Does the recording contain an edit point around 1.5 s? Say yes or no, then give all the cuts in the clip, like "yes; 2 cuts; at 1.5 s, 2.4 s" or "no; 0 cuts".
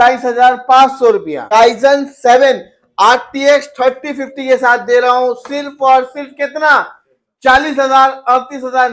yes; 1 cut; at 1.5 s